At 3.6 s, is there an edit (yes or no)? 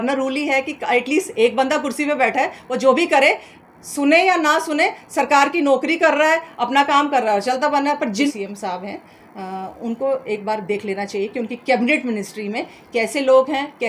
no